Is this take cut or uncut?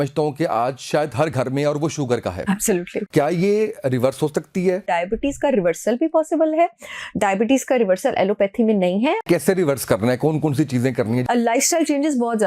cut